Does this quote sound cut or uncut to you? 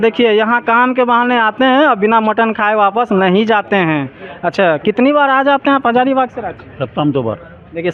uncut